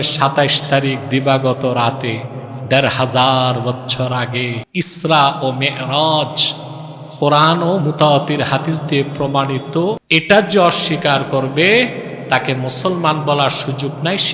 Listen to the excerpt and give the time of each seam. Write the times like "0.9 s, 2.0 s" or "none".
4.6 s, 10.0 s